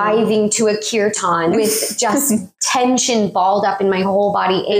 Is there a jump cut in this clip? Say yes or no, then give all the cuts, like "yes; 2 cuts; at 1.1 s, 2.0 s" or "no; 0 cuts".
yes; 1 cut; at 2.6 s